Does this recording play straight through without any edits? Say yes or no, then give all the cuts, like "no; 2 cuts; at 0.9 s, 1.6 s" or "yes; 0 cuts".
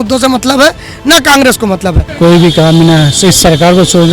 no; 1 cut; at 2.0 s